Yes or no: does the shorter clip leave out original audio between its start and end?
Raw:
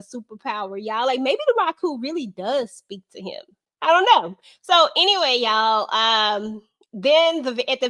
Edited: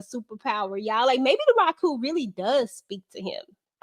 no